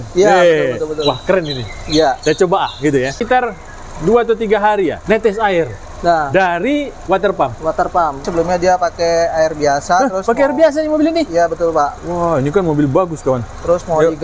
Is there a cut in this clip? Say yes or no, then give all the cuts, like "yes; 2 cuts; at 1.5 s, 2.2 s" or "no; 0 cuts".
yes; 4 cuts; at 3.2 s, 5.0 s, 7.0 s, 8.3 s